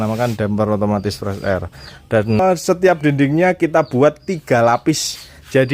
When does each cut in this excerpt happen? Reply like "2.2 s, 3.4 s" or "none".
2.4 s